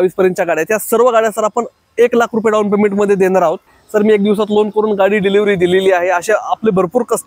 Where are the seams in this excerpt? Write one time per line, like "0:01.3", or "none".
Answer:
0:03.7